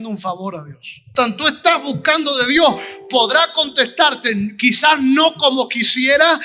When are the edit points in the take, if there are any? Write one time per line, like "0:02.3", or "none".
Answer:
0:01.1

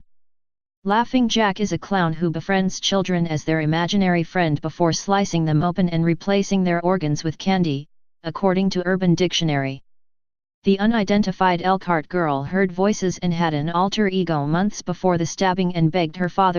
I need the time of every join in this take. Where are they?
0:15.2

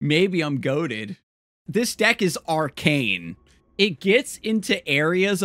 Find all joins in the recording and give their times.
0:01.6

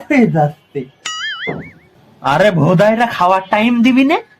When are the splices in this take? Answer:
0:01.9

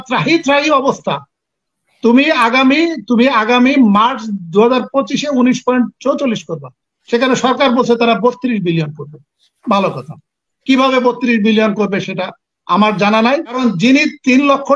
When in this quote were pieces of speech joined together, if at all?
0:13.6

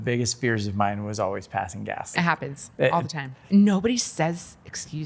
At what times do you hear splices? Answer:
0:02.1
0:03.4

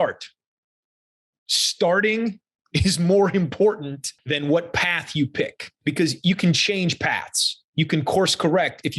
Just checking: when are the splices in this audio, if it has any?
0:04.1
0:05.6

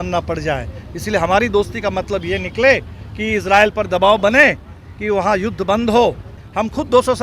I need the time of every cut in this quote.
0:06.3

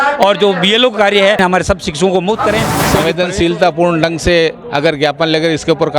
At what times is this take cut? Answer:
0:01.4
0:02.8

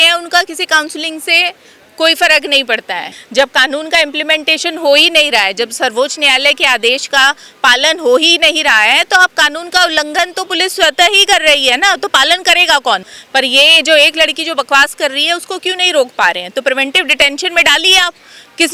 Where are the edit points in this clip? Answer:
0:03.2
0:13.1

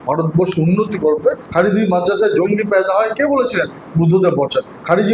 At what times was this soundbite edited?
0:01.4

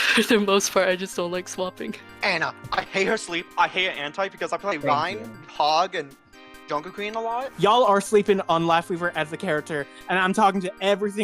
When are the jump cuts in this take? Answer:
0:02.0
0:07.5

